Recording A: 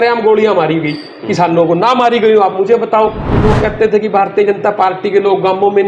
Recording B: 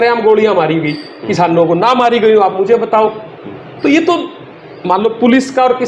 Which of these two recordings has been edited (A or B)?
A